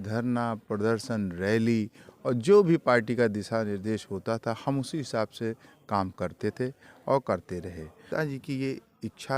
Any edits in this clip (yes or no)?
yes